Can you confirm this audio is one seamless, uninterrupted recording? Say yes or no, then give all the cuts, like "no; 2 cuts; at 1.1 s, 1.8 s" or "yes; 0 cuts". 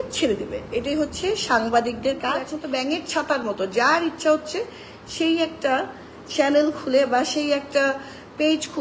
no; 1 cut; at 2.5 s